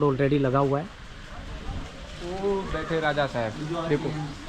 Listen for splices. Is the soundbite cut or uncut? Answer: uncut